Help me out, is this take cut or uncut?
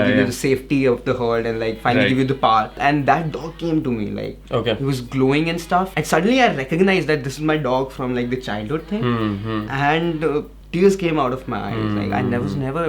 cut